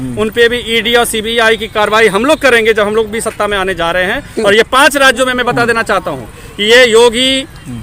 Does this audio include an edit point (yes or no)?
no